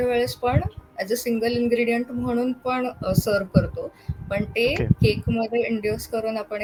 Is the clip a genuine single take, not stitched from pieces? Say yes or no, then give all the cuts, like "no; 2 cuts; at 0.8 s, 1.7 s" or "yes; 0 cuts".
yes; 0 cuts